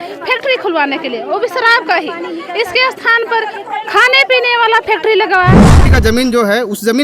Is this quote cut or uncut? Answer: cut